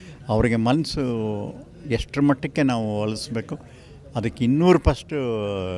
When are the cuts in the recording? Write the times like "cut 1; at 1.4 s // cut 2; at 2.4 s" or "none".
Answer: none